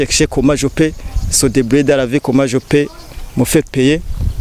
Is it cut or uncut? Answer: uncut